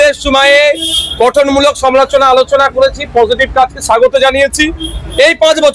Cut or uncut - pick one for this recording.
uncut